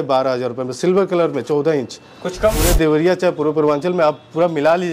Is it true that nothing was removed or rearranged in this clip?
no; 1 cut; at 2.6 s

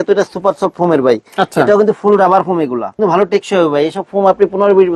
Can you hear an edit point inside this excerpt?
yes; 1 cut; at 3.0 s

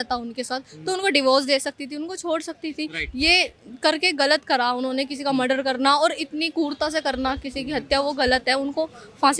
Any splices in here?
no; 0 cuts

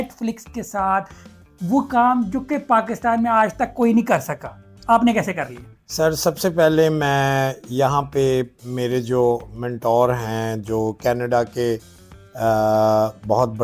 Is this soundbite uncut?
yes; 0 cuts

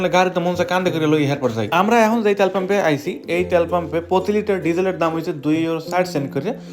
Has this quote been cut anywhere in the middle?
no; 0 cuts

